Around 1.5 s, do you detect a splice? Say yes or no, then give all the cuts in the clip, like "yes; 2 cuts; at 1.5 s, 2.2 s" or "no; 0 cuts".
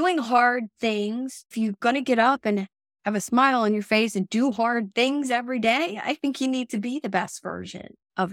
yes; 1 cut; at 1.5 s